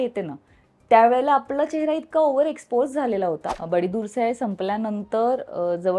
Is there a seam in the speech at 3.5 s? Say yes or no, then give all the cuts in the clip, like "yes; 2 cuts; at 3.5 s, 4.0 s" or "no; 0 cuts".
yes; 1 cut; at 3.5 s